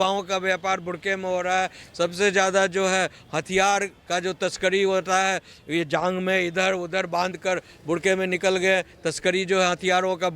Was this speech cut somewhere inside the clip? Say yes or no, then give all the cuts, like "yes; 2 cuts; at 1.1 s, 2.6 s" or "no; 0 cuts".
no; 0 cuts